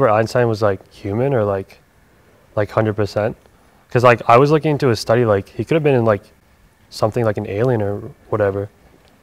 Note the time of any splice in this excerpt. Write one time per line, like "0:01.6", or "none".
none